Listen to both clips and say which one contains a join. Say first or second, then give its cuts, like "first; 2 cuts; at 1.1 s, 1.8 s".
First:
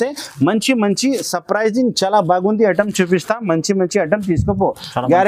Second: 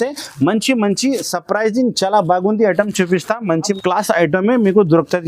second; 1 cut; at 3.8 s